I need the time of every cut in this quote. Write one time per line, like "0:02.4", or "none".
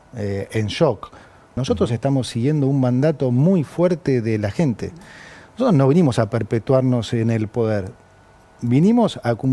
0:01.5